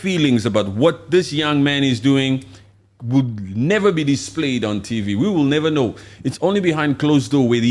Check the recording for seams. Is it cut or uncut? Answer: uncut